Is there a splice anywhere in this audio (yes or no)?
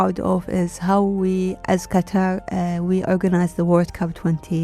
no